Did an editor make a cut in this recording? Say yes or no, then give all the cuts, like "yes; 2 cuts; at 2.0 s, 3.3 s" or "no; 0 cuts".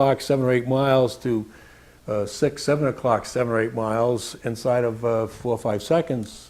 no; 0 cuts